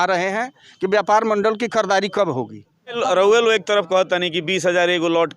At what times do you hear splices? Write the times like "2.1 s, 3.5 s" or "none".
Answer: 3.0 s